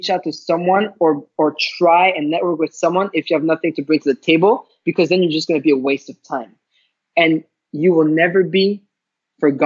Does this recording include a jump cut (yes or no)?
no